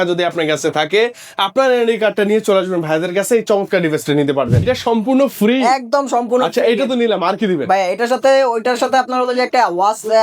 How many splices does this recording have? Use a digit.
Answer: 1